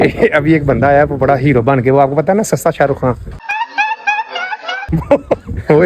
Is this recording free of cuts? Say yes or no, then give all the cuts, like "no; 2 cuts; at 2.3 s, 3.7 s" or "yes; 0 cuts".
yes; 0 cuts